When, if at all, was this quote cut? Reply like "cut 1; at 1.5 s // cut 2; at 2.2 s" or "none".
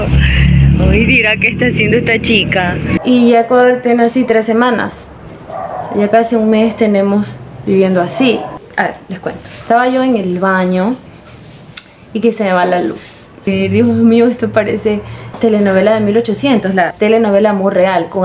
cut 1; at 3.0 s // cut 2; at 8.5 s // cut 3; at 13.5 s // cut 4; at 15.2 s // cut 5; at 16.9 s